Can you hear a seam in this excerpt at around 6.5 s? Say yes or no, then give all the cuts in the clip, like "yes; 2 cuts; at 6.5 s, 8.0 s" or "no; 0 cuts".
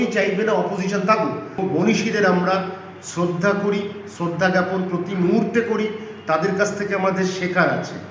no; 1 cut; at 1.6 s